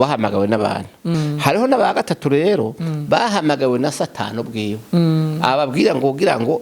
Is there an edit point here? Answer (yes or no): yes